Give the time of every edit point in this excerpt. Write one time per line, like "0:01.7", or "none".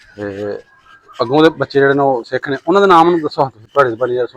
none